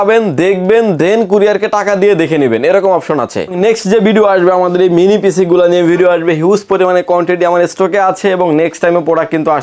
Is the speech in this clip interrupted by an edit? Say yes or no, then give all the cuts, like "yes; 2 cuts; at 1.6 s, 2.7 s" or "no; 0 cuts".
yes; 1 cut; at 3.6 s